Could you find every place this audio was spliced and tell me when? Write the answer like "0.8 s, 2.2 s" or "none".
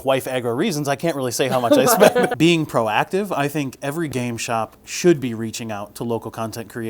2.3 s